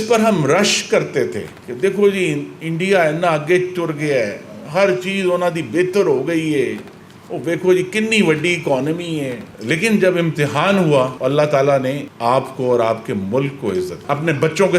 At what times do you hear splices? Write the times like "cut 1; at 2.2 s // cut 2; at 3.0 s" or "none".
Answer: cut 1; at 9.5 s // cut 2; at 14.0 s